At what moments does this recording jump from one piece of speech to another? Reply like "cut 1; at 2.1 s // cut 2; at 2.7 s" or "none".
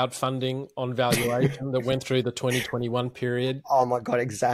none